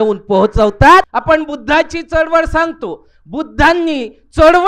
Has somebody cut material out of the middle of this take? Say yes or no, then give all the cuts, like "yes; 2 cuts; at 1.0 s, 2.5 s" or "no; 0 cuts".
yes; 1 cut; at 1.1 s